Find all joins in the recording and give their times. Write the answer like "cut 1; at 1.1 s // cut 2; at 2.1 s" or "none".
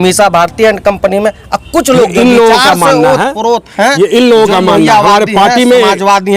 none